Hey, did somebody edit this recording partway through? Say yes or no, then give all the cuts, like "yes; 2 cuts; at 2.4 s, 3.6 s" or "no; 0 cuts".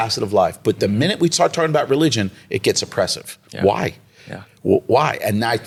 no; 0 cuts